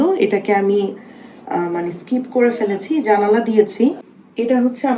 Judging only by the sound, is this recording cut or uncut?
cut